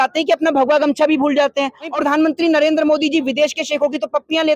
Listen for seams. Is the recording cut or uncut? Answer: cut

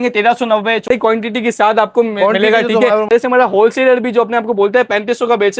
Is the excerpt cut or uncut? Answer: cut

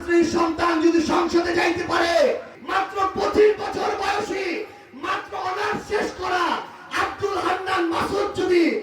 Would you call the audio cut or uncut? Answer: cut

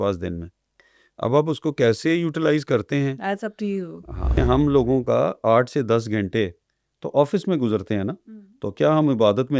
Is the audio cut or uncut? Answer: cut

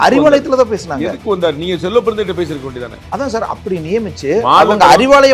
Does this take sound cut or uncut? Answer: cut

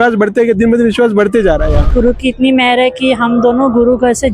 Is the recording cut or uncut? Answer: cut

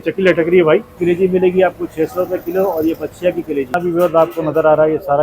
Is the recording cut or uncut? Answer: cut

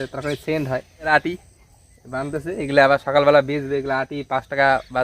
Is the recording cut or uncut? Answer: cut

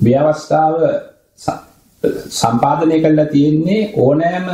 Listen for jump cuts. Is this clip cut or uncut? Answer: uncut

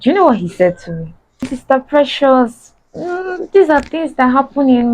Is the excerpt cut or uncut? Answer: cut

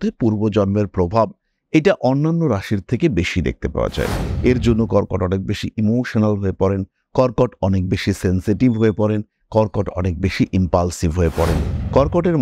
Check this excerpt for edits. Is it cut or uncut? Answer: uncut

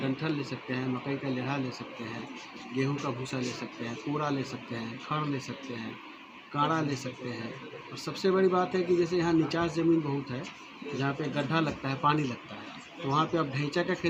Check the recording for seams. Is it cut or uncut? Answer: uncut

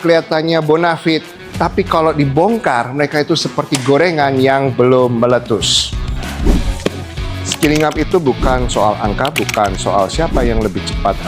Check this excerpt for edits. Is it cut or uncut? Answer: uncut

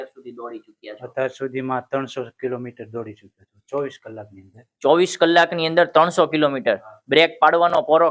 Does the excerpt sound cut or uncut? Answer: uncut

